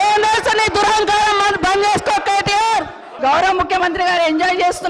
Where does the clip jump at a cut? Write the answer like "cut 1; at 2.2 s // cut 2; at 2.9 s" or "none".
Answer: cut 1; at 3.0 s